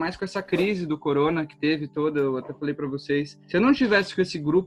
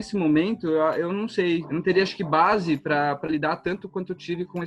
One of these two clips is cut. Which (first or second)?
second